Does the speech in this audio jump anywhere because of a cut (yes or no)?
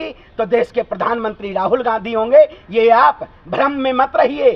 no